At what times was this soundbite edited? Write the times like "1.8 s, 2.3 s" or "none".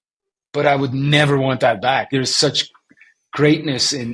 2.1 s